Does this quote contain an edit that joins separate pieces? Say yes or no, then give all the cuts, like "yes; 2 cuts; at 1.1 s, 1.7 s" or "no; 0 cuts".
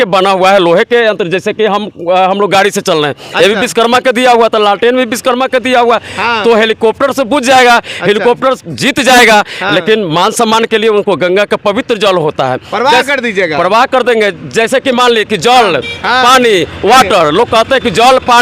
no; 0 cuts